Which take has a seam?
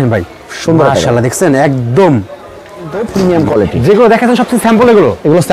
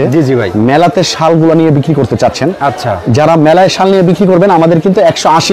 first; 1 cut; at 3.0 s

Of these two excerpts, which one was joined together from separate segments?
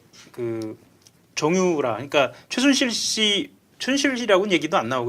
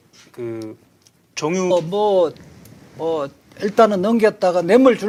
first; 1 cut; at 1.7 s

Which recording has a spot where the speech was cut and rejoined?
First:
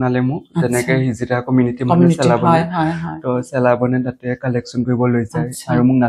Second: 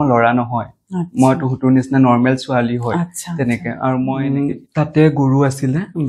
second; 1 cut; at 4.2 s

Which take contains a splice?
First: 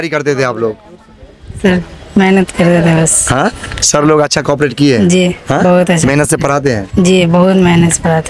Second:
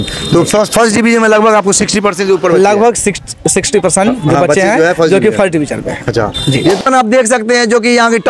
second; 1 cut; at 6.8 s

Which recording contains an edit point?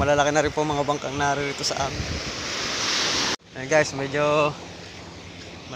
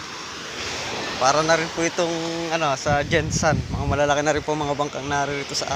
first; 1 cut; at 3.4 s

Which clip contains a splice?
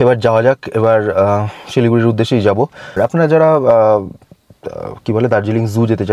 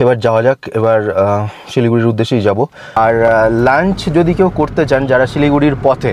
second; 1 cut; at 3.0 s

